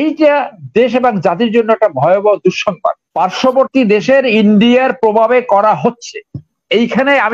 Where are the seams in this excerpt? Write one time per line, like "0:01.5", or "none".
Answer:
0:03.0